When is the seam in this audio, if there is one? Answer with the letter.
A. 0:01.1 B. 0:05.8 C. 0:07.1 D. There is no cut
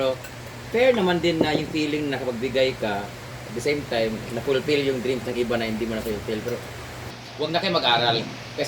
C